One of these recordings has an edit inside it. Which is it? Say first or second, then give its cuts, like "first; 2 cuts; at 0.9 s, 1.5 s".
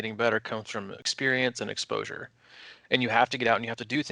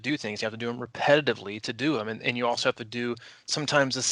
first; 1 cut; at 1.0 s